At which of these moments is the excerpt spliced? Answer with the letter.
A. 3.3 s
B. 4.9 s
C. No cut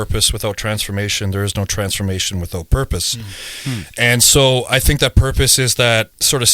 C